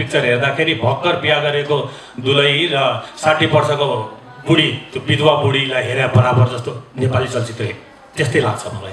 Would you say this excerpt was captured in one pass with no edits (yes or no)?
yes